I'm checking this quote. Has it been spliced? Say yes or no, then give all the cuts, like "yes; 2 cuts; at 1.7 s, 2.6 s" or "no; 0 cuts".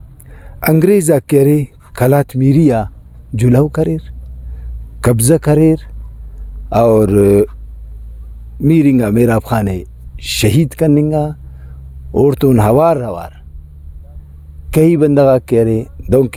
no; 0 cuts